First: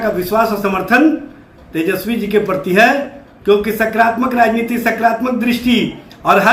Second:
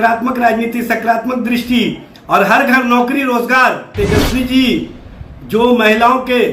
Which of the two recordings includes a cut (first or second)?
second